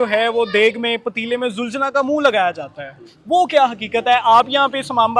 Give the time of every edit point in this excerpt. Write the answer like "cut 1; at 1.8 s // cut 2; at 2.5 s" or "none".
none